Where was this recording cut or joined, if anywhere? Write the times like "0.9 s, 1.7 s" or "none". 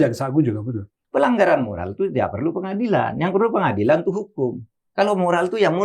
0.9 s